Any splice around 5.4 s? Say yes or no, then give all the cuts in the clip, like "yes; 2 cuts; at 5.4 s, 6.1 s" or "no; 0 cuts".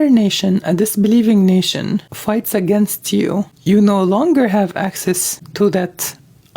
yes; 3 cuts; at 2.1 s, 3.5 s, 5.4 s